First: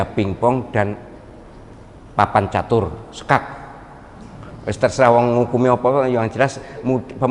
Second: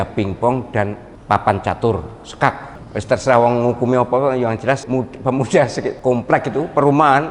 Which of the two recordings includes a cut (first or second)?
second